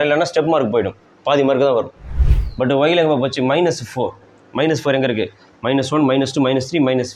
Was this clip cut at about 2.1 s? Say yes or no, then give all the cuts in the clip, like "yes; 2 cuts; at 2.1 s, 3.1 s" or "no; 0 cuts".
yes; 1 cut; at 2.1 s